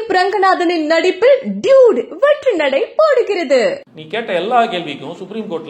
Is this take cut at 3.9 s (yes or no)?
yes